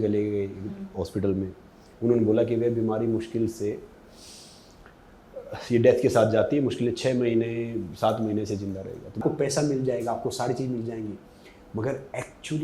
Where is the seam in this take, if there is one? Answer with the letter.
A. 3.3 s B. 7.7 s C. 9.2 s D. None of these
C